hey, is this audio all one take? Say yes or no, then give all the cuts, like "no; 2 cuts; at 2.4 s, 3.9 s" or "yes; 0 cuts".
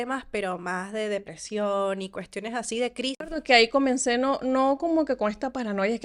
no; 1 cut; at 3.3 s